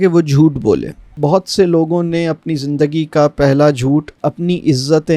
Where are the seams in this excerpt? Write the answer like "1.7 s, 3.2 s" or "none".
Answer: 1.1 s